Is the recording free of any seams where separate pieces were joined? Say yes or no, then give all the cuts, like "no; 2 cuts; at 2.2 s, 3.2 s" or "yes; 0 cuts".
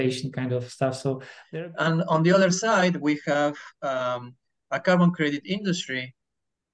no; 1 cut; at 1.3 s